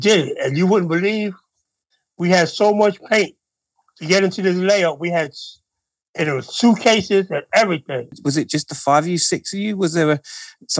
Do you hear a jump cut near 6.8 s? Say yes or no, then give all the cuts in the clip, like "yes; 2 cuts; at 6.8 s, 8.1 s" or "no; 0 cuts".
no; 1 cut; at 8.1 s